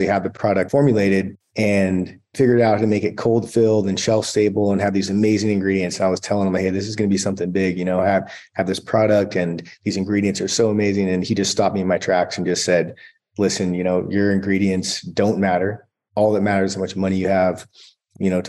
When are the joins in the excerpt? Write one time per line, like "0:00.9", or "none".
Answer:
none